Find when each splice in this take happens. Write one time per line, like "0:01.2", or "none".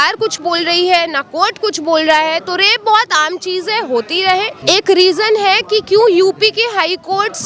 0:04.5